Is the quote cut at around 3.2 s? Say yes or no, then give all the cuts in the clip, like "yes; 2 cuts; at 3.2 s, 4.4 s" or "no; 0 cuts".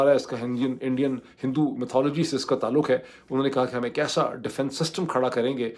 no; 0 cuts